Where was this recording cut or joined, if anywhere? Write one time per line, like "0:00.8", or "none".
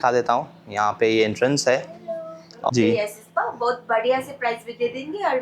0:02.7